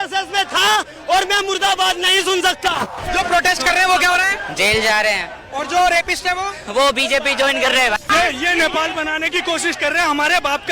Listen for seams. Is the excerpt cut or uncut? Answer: cut